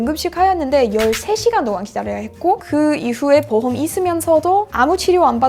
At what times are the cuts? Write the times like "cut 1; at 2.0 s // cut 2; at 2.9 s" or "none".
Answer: none

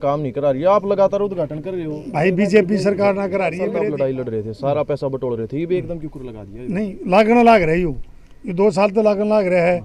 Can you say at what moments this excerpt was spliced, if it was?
cut 1; at 3.6 s

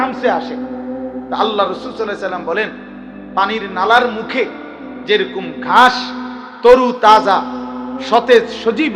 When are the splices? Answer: none

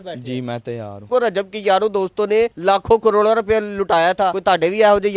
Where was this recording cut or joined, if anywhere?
cut 1; at 1.1 s // cut 2; at 2.5 s // cut 3; at 4.4 s

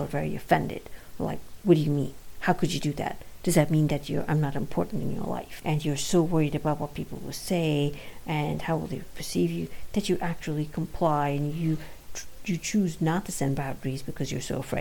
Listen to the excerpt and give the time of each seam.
cut 1; at 5.5 s

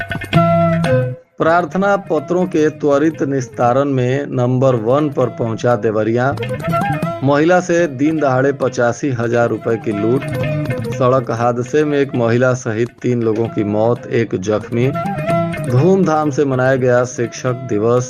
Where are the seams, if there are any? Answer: cut 1; at 1.2 s

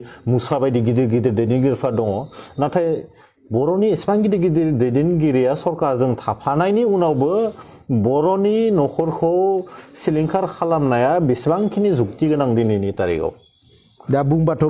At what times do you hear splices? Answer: none

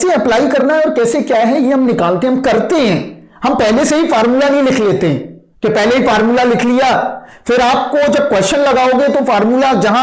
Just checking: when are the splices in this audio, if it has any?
none

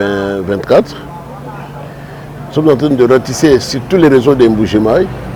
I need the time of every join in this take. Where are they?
none

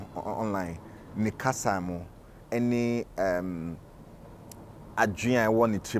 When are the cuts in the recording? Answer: none

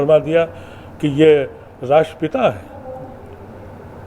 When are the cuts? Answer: none

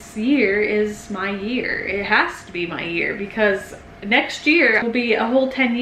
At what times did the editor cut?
cut 1; at 4.8 s

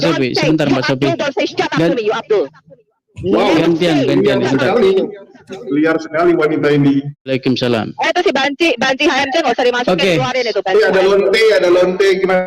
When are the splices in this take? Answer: cut 1; at 7.3 s

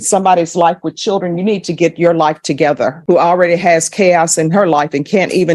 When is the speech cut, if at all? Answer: cut 1; at 3.0 s

